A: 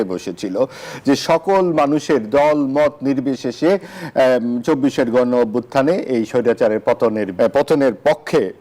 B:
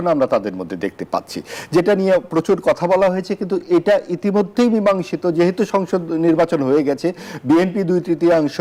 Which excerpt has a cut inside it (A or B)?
A